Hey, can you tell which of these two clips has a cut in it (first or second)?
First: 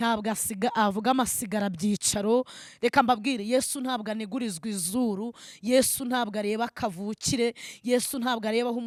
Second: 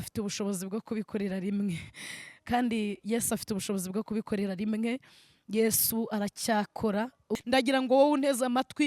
second